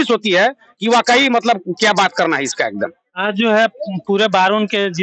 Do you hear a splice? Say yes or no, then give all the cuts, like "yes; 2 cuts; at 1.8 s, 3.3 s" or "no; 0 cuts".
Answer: no; 0 cuts